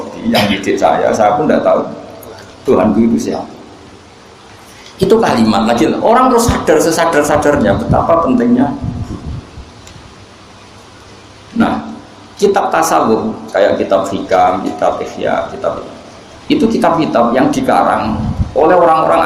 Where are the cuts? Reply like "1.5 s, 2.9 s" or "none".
none